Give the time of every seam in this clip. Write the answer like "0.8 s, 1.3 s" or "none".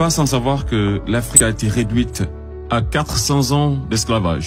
1.3 s